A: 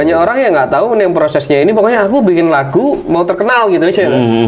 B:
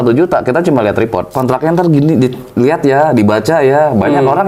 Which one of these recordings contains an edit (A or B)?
B